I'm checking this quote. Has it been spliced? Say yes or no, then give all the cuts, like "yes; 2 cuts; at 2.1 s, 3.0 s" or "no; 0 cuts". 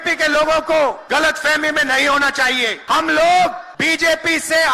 yes; 3 cuts; at 1.0 s, 2.8 s, 3.7 s